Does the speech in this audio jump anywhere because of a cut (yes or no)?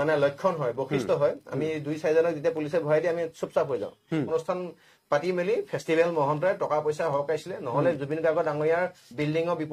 yes